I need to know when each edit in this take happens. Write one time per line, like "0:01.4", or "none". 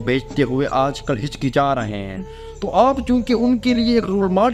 none